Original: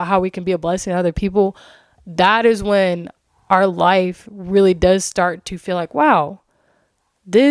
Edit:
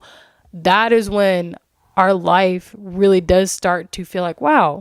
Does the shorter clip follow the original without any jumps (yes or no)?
yes